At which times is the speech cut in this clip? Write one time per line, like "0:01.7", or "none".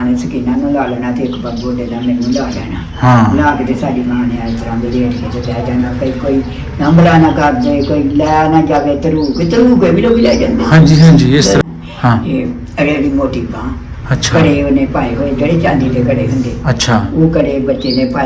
0:11.6